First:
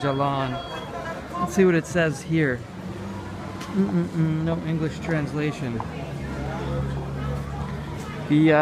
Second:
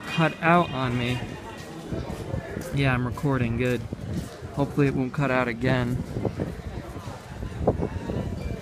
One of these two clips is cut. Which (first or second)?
first